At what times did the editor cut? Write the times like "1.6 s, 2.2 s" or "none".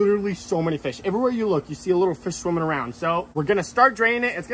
none

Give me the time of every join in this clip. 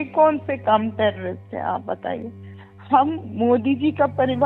2.7 s

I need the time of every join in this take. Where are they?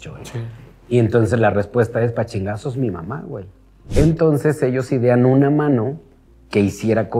3.8 s

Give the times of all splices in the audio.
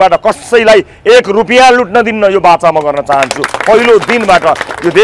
none

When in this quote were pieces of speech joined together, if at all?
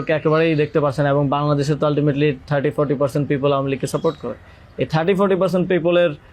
none

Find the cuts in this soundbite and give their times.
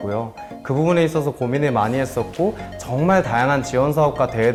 none

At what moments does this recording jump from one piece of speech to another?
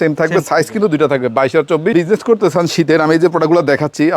1.9 s

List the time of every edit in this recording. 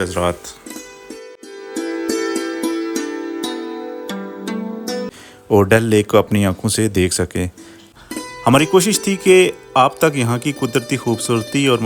5.2 s, 7.9 s

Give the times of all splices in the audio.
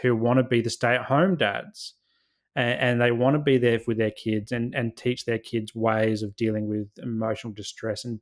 none

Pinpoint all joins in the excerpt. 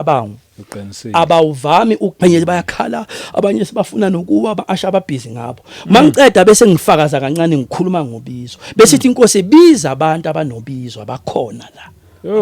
2.1 s

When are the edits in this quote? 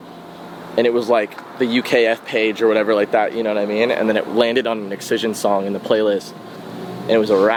none

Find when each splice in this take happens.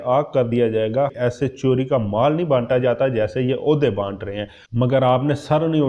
1.1 s, 4.6 s

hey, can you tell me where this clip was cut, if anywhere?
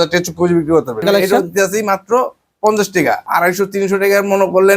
1.0 s, 3.2 s

